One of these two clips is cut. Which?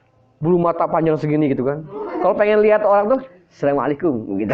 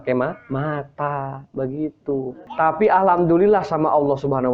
second; 1 cut; at 2.4 s

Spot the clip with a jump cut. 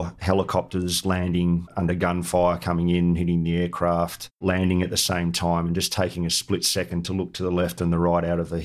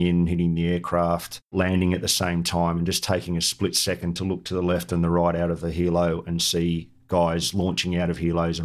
first; 1 cut; at 1.7 s

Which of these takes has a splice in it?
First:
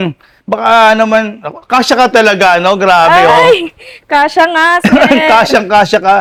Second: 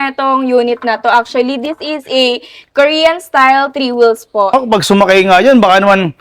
second; 1 cut; at 4.5 s

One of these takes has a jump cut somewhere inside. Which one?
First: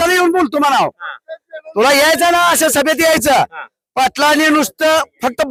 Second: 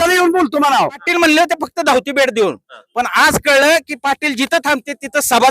second; 1 cut; at 1.0 s

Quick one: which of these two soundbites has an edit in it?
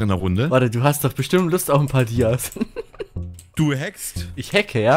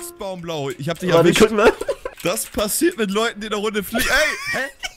second; 1 cut; at 2.1 s

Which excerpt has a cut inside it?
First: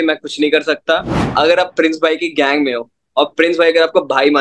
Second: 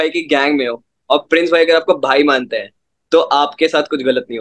first; 1 cut; at 1.2 s

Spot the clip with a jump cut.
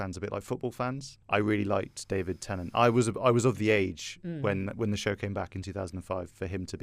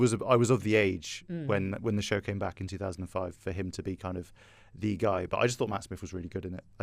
first; 1 cut; at 1.1 s

